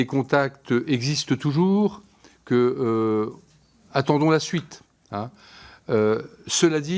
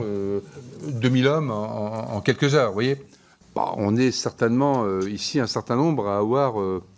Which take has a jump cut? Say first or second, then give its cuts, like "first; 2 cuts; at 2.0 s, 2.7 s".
second; 1 cut; at 3.3 s